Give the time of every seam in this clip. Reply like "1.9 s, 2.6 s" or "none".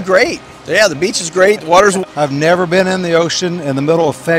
2.0 s